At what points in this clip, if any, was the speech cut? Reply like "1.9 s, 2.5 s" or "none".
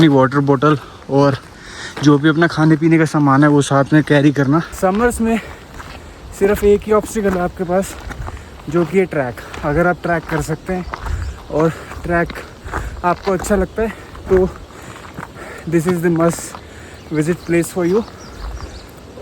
4.7 s